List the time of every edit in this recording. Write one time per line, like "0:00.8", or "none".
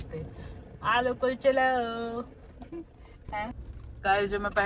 0:03.2